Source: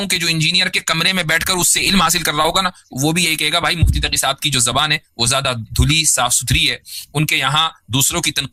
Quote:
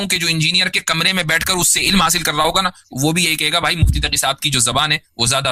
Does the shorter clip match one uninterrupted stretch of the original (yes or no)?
yes